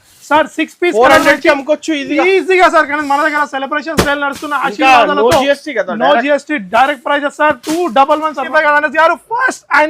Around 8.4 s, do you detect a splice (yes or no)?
yes